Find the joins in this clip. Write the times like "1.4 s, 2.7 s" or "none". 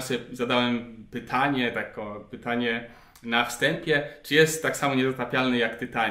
none

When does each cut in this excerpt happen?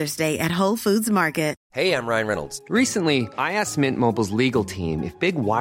1.6 s

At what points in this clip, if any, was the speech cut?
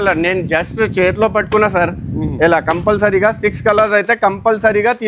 none

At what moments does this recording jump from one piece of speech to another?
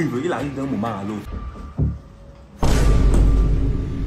1.3 s

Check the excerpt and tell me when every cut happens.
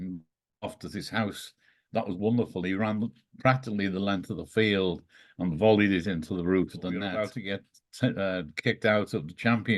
7.3 s

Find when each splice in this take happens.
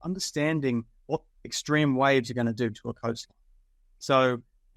none

